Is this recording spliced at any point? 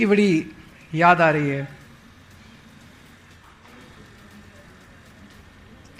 yes; 1 cut; at 3.6 s

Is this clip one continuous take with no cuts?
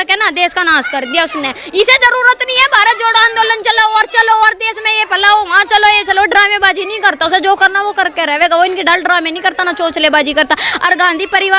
yes; 0 cuts

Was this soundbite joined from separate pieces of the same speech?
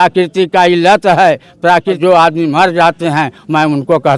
yes; 1 cut; at 2.0 s

